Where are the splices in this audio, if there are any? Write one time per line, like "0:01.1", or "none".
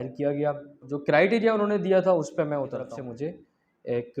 0:00.9
0:02.9